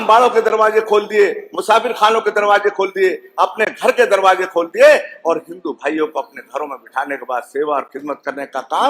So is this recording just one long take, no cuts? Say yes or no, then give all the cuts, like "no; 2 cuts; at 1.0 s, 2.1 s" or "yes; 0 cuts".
yes; 0 cuts